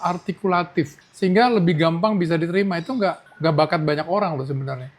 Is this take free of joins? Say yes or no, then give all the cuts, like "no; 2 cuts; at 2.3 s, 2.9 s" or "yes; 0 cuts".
no; 2 cuts; at 1.0 s, 3.3 s